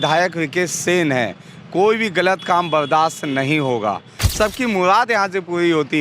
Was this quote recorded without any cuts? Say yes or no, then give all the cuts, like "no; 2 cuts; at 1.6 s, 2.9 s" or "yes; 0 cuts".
no; 1 cut; at 4.1 s